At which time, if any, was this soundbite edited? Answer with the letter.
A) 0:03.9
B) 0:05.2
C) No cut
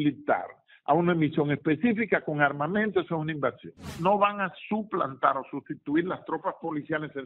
A